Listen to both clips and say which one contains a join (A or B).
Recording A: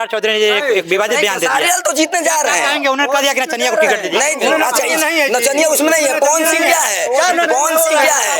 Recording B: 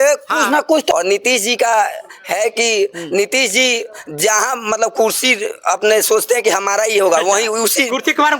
B